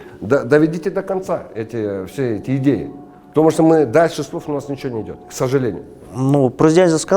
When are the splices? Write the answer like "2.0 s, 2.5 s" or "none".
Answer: none